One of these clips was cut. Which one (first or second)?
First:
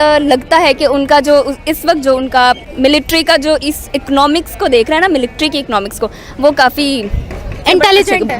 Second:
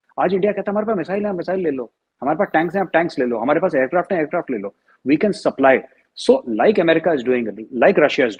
first